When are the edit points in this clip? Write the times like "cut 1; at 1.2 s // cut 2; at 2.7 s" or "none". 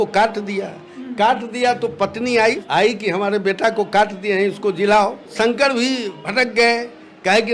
cut 1; at 2.6 s // cut 2; at 5.3 s // cut 3; at 6.2 s